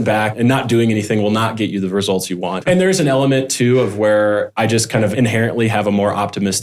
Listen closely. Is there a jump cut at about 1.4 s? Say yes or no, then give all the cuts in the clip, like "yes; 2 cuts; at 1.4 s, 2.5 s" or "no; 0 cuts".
no; 1 cut; at 2.6 s